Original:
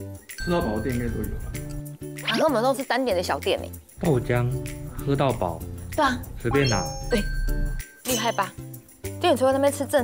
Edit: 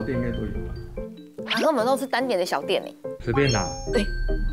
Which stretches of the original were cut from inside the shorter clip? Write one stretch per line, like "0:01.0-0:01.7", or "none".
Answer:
0:03.9-0:06.3